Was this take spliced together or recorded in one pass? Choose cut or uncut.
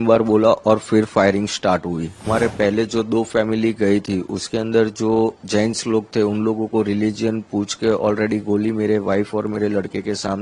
cut